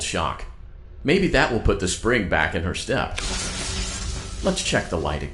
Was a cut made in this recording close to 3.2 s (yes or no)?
yes